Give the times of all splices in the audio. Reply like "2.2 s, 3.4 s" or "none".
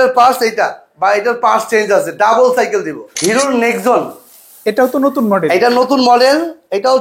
3.1 s